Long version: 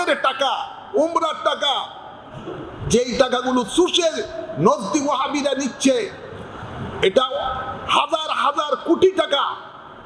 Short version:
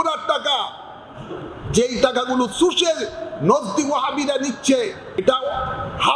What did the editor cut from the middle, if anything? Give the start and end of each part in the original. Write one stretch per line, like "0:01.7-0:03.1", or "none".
0:06.4-0:07.1